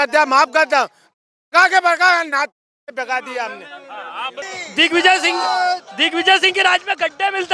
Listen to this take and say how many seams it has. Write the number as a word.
one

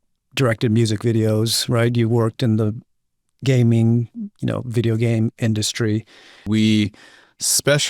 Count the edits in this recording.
one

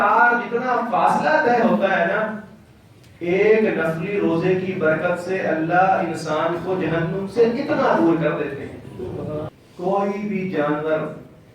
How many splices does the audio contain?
one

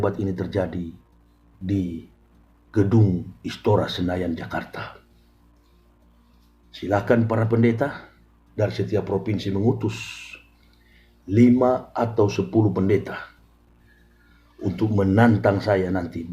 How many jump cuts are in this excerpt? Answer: zero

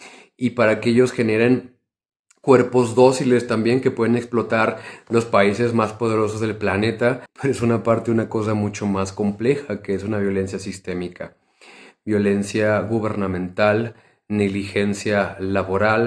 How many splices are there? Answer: one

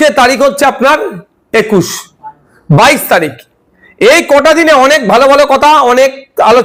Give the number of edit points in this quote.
zero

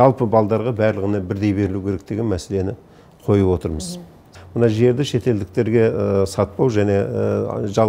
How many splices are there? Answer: one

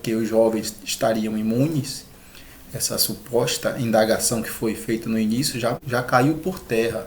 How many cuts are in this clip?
one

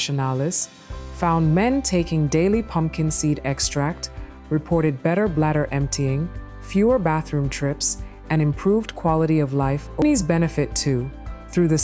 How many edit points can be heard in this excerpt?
one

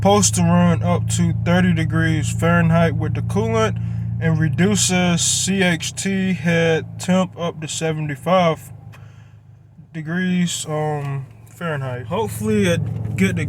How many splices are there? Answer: one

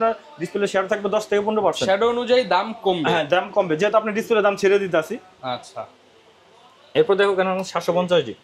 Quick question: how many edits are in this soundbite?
zero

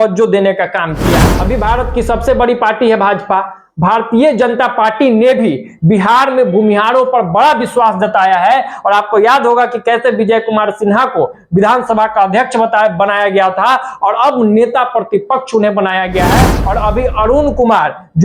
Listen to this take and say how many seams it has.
two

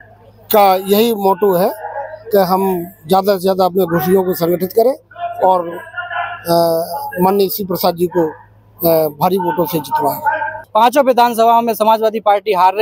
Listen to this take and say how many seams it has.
one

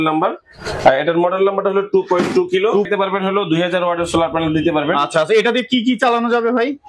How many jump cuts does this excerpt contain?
one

